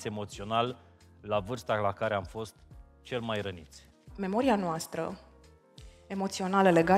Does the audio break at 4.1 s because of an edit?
yes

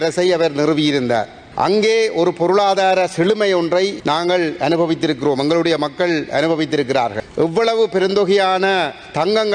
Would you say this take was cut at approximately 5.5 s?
no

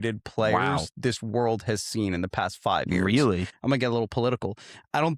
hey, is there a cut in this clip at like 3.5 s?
yes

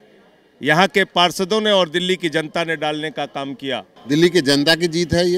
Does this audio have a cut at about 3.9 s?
yes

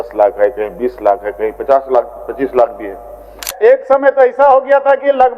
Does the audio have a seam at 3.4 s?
yes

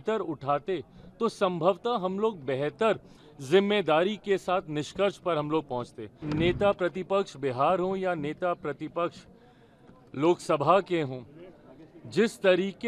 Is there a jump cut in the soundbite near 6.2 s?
yes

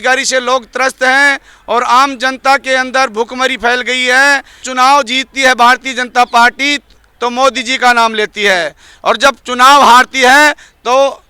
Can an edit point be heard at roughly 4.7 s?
yes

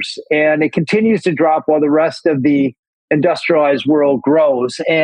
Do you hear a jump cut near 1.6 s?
no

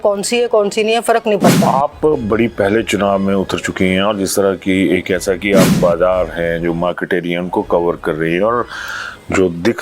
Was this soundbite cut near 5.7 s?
yes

